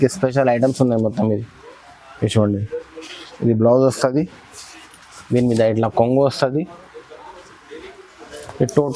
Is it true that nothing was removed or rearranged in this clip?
yes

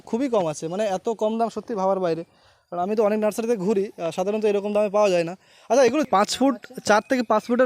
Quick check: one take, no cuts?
no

